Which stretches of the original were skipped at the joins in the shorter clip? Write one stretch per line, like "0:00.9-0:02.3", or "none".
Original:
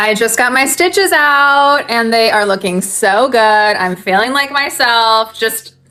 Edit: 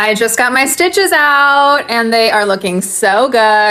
none